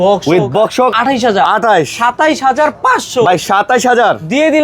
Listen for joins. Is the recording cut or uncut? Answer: cut